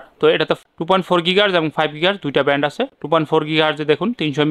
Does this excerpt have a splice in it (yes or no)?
no